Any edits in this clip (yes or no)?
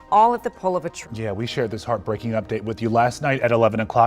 yes